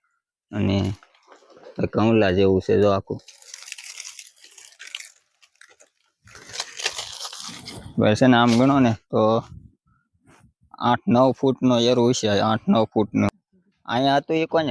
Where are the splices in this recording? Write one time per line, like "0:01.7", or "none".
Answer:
0:13.3